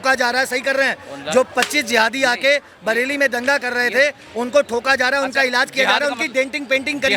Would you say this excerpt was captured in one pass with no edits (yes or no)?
yes